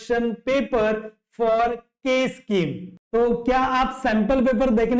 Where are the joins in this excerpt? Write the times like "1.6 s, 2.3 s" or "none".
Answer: 2.9 s